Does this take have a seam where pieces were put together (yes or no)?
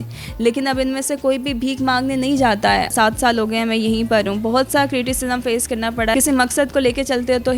yes